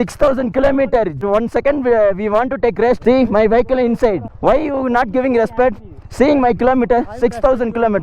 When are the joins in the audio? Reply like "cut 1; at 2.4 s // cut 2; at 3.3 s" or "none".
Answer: cut 1; at 1.2 s // cut 2; at 3.0 s // cut 3; at 4.3 s